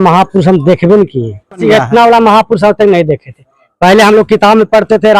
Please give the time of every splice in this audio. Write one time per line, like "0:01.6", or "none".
0:01.6